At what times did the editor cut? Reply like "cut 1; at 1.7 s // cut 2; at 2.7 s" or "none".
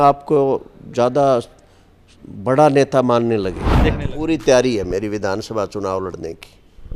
cut 1; at 4.1 s